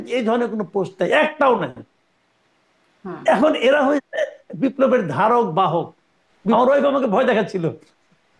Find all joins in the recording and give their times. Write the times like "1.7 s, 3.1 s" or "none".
6.5 s